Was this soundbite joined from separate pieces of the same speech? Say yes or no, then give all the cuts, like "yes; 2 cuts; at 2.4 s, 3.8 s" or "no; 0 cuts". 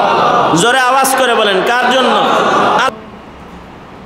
yes; 1 cut; at 2.9 s